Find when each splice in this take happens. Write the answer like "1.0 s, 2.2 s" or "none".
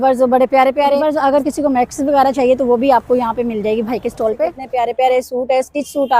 1.0 s, 4.6 s